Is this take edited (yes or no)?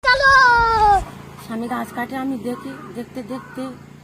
yes